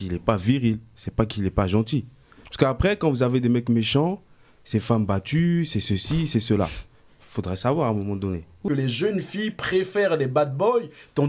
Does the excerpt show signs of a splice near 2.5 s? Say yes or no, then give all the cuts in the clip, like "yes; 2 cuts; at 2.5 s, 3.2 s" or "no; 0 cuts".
no; 1 cut; at 8.6 s